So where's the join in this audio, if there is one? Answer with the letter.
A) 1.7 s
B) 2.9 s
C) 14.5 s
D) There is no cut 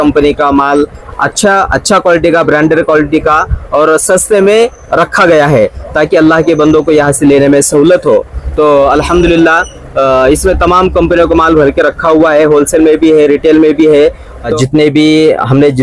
C